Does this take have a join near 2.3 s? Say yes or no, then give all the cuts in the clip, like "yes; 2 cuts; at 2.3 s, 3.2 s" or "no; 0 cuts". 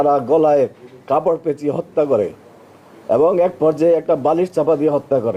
no; 0 cuts